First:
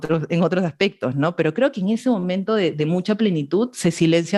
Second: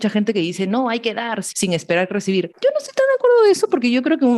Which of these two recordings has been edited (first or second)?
second